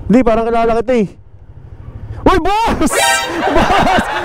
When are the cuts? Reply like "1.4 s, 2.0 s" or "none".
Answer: none